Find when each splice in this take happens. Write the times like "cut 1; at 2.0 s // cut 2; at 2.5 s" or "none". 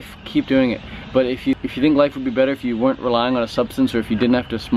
cut 1; at 1.6 s